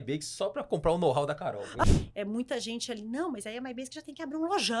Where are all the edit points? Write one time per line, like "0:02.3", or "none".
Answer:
0:01.8